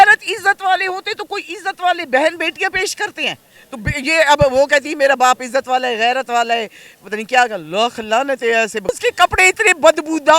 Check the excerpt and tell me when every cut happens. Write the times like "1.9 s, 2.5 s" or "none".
8.9 s